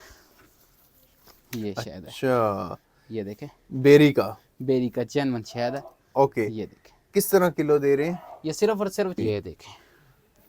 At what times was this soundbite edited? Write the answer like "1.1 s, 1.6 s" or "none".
9.2 s